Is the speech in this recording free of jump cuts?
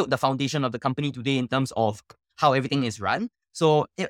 yes; 0 cuts

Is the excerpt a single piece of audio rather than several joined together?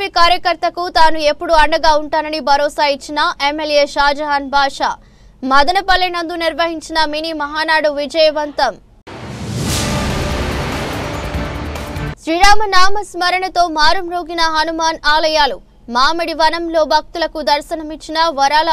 yes; 0 cuts

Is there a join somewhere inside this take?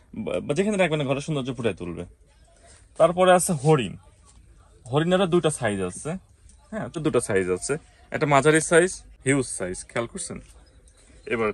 yes; 2 cuts; at 7.0 s, 9.1 s

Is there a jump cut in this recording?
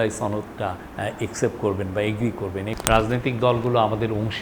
yes; 1 cut; at 2.7 s

